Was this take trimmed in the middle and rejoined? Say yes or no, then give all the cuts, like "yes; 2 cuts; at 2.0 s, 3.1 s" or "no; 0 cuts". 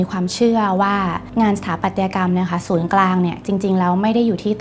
yes; 1 cut; at 1.2 s